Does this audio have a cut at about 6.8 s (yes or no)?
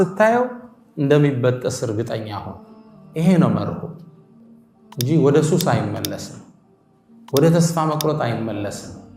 no